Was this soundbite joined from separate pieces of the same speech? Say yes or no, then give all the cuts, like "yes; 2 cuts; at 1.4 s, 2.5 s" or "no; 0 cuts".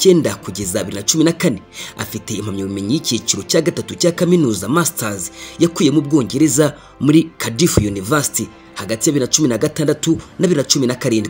yes; 1 cut; at 7.4 s